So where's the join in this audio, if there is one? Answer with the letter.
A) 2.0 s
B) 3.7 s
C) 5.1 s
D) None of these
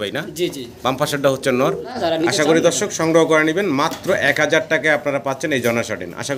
A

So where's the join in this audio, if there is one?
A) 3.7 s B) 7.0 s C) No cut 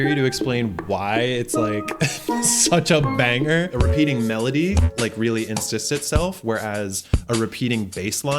A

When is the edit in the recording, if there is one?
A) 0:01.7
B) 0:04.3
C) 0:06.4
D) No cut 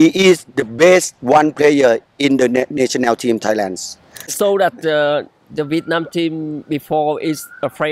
B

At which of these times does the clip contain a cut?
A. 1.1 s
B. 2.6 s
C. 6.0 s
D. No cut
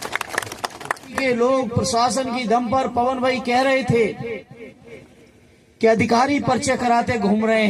A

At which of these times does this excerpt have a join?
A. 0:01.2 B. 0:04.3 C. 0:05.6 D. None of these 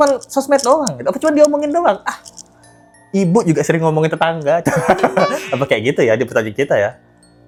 D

